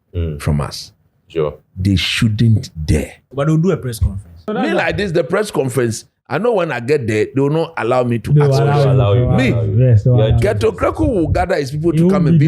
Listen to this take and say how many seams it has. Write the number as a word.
two